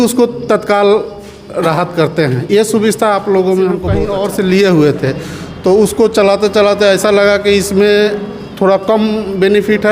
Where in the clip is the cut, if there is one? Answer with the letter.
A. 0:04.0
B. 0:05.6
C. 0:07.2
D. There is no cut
A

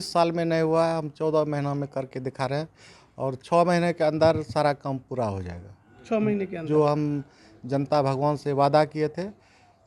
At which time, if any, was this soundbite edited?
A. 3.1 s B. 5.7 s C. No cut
C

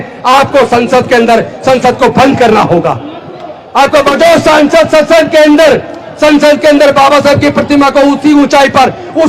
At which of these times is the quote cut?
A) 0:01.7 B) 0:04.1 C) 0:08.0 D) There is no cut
B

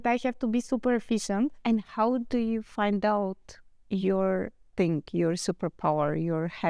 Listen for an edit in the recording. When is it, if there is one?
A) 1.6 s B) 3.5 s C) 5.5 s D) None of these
A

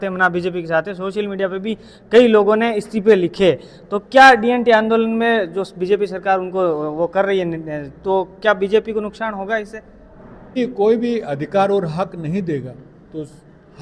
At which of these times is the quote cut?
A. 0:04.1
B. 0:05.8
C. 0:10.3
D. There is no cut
D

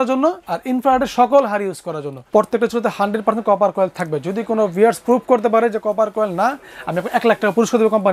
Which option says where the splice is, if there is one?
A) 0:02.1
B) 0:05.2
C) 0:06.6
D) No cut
A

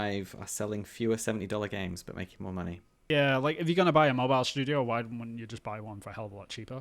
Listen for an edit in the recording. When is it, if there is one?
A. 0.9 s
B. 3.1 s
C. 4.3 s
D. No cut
B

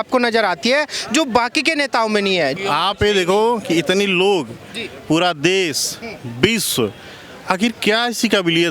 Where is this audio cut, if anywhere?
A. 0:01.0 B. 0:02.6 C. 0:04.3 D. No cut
B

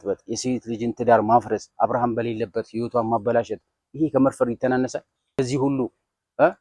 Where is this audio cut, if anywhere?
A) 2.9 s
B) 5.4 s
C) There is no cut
B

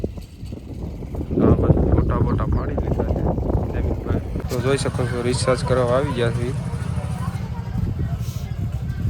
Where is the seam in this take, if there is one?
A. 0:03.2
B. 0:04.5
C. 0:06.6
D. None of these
B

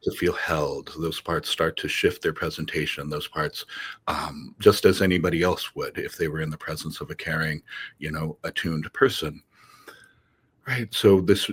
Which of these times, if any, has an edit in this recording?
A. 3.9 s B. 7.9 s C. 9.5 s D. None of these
D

